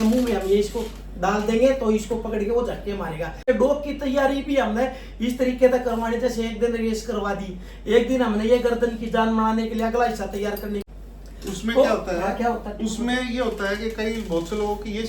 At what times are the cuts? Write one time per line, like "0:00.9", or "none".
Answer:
0:03.5
0:10.9